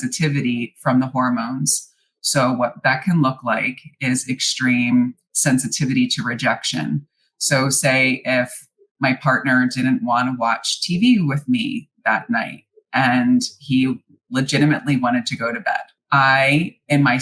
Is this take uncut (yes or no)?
no